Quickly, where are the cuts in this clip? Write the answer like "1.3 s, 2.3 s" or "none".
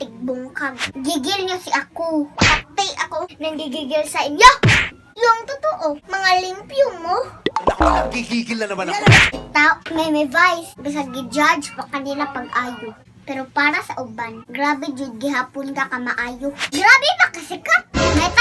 0.8 s, 9.4 s, 16.7 s